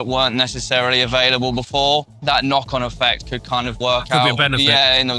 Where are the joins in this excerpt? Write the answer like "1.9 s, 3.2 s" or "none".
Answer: 2.1 s, 3.8 s